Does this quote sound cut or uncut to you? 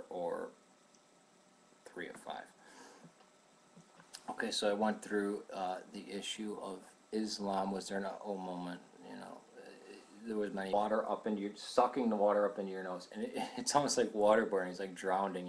uncut